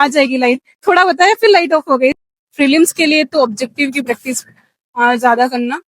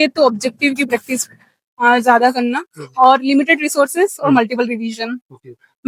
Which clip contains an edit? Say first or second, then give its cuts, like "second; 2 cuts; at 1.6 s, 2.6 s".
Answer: first; 1 cut; at 2.2 s